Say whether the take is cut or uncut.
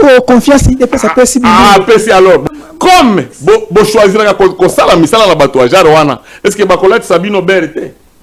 cut